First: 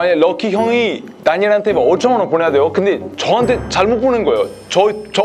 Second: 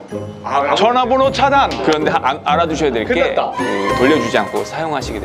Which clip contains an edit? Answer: second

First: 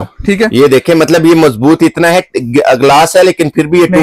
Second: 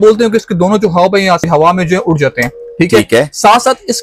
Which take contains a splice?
second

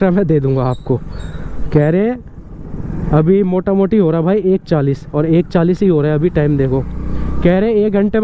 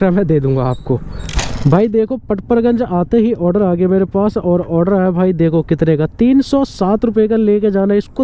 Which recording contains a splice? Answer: second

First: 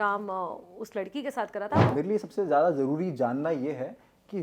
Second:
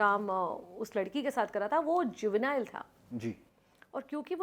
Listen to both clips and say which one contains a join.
first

